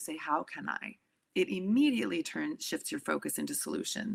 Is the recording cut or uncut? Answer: uncut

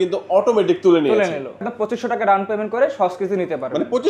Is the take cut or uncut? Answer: cut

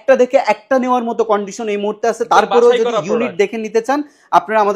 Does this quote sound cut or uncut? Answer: uncut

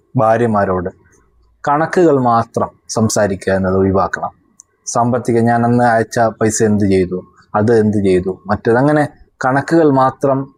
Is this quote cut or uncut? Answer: uncut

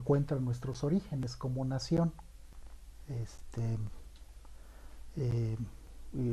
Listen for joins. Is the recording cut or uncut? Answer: cut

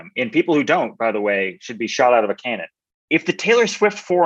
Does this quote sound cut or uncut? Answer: cut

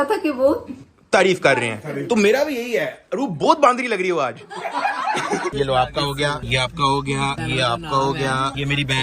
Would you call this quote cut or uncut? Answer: cut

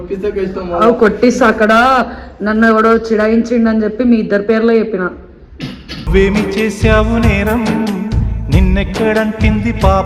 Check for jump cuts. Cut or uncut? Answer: uncut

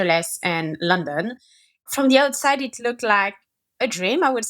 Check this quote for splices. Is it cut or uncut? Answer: cut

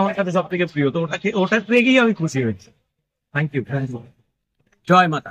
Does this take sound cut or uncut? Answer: uncut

